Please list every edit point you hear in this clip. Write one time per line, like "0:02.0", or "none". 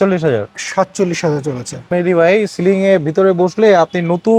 0:01.8